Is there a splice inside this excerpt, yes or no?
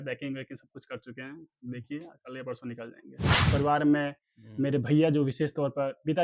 yes